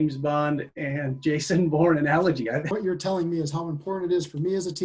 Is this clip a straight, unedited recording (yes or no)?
no